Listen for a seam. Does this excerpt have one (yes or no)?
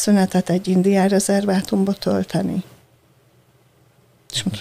no